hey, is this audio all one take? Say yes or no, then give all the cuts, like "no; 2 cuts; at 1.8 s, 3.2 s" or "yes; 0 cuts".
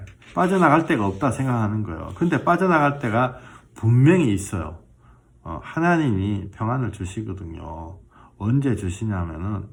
yes; 0 cuts